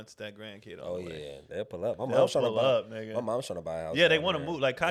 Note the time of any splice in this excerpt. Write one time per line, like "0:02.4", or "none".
none